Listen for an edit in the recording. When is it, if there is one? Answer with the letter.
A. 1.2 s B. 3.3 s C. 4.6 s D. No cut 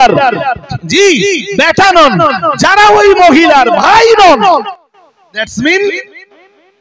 C